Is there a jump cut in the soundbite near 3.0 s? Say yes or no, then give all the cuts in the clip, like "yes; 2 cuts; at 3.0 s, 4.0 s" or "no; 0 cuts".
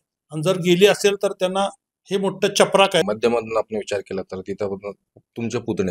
yes; 1 cut; at 3.0 s